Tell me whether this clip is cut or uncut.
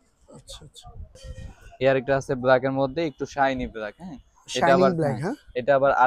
cut